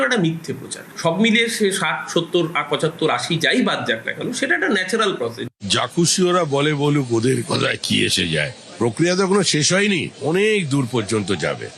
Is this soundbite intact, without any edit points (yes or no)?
no